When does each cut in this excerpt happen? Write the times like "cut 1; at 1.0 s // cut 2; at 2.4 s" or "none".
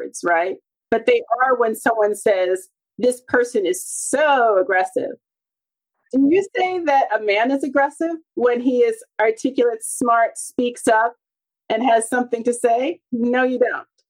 cut 1; at 6.0 s